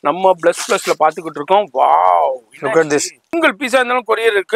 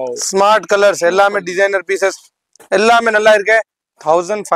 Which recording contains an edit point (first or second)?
first